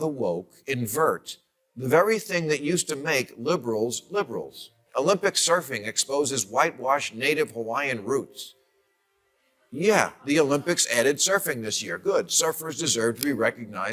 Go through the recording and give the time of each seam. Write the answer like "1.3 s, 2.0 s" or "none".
4.8 s